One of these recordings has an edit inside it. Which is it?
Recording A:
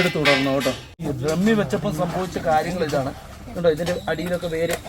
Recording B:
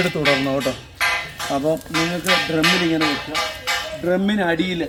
A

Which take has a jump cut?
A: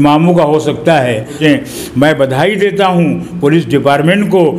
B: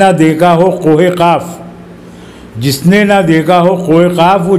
A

